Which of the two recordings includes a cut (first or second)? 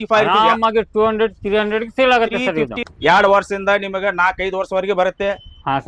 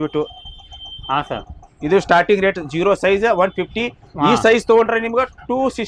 first